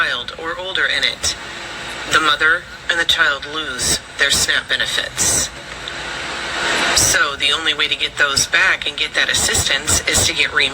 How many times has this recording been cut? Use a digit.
1